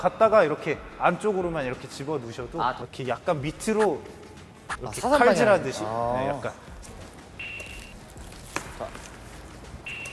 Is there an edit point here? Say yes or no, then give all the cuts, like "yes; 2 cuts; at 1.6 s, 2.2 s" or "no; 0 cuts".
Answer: yes; 2 cuts; at 2.8 s, 6.8 s